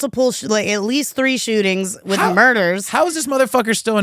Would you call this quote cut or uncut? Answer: uncut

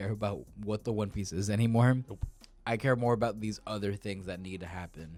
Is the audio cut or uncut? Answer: uncut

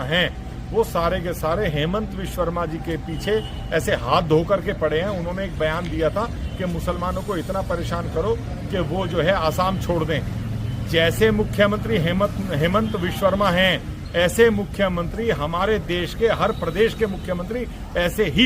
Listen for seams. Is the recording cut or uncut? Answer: uncut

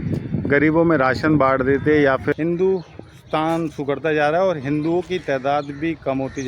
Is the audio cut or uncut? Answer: cut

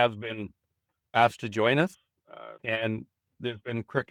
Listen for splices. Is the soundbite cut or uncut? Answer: uncut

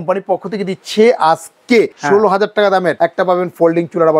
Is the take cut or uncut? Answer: cut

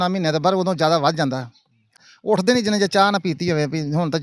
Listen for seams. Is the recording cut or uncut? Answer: cut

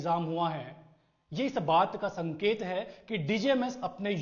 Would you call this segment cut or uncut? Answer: uncut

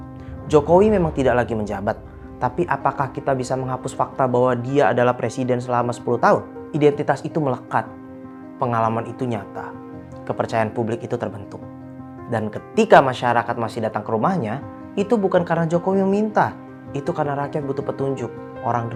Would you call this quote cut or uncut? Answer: uncut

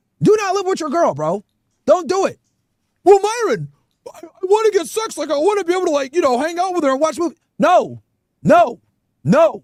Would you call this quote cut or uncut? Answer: uncut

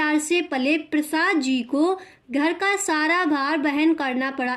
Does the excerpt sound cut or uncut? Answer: uncut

